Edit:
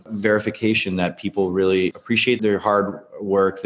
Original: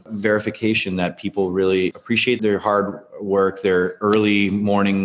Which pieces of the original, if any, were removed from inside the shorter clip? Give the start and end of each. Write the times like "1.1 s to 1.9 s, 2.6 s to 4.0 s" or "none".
none